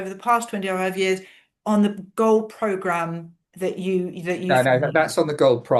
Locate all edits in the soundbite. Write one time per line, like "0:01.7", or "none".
none